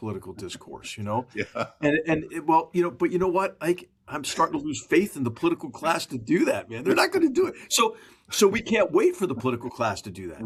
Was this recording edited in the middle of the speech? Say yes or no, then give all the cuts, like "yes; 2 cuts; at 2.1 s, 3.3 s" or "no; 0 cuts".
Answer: no; 0 cuts